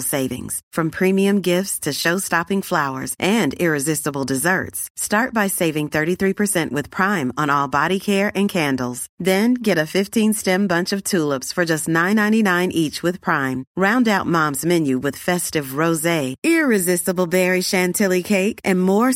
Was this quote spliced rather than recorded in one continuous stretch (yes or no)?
no